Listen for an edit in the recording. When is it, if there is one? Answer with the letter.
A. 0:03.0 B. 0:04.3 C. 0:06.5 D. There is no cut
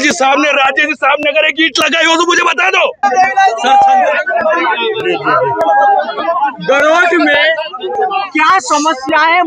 A